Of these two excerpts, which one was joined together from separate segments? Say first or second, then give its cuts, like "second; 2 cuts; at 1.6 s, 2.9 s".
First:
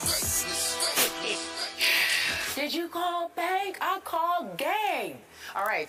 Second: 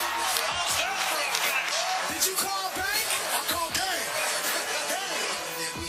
second; 1 cut; at 3.2 s